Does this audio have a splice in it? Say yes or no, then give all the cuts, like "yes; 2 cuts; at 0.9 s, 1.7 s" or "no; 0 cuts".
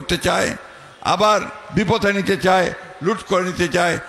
no; 0 cuts